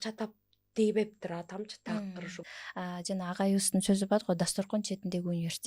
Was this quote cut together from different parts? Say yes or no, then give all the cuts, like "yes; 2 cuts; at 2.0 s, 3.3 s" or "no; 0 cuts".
yes; 1 cut; at 2.4 s